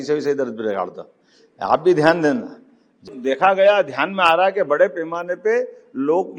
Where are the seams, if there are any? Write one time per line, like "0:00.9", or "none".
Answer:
0:03.1

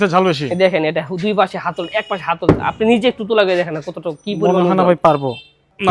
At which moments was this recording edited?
none

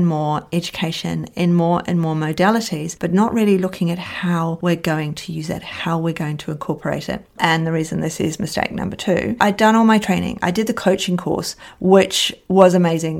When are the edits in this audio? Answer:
0:07.3
0:09.4

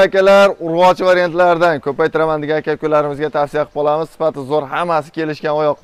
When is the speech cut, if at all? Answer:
none

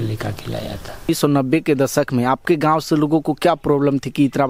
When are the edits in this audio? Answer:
0:01.1

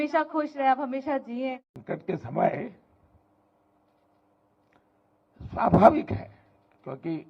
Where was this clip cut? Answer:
0:01.7

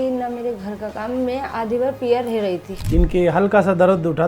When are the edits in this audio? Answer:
0:02.7

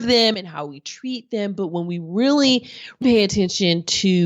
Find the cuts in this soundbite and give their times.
0:03.0

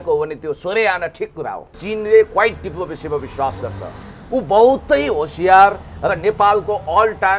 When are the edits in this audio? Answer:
0:01.7

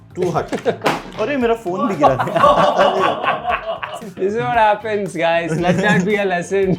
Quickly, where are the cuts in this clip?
0:04.0

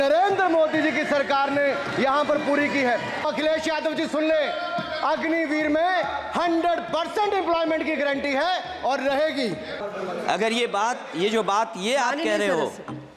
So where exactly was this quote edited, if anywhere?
0:03.2
0:09.8

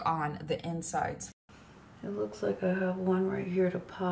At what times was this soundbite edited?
0:01.2

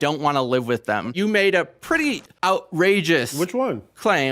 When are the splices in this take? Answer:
0:01.1
0:02.3

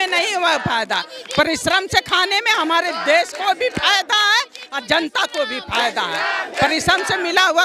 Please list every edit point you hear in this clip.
none

